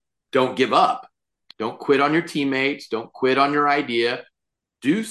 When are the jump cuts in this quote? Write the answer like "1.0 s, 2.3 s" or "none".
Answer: 1.4 s